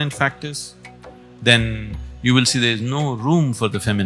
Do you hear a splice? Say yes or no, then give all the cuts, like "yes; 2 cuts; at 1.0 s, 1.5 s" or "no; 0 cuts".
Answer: no; 0 cuts